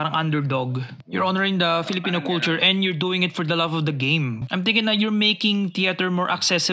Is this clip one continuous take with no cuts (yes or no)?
no